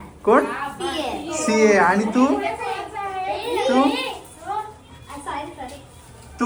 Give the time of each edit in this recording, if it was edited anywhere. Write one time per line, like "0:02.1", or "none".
none